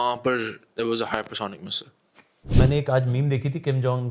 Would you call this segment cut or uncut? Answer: cut